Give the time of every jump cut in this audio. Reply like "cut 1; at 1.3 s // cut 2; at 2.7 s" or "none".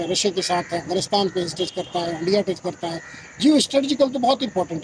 none